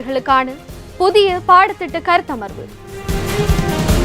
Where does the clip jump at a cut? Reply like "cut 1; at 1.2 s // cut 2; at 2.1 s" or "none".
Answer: cut 1; at 3.0 s